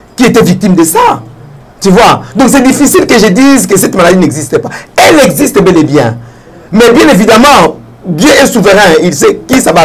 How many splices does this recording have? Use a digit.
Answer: 0